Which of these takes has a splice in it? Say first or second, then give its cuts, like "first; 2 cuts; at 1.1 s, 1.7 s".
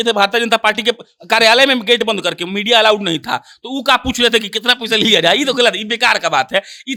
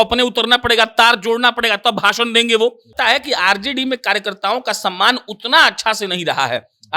second; 1 cut; at 2.9 s